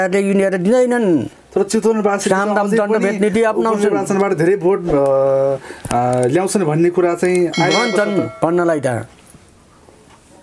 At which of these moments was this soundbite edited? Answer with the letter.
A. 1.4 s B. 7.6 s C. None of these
C